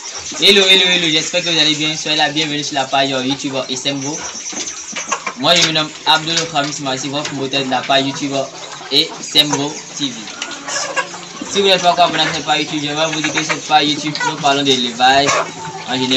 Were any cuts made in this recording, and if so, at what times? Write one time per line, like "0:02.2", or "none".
none